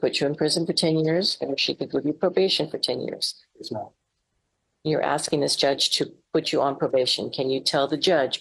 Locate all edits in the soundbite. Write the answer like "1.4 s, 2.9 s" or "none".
none